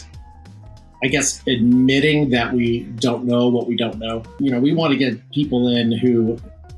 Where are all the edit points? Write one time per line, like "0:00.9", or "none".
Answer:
0:04.3